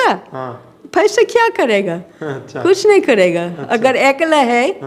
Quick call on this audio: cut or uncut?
uncut